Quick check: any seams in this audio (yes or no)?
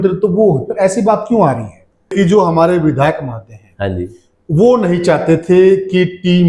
yes